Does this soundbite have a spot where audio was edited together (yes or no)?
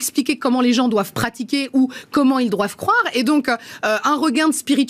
no